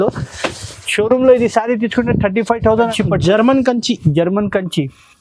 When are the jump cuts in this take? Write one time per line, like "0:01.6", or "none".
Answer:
0:02.9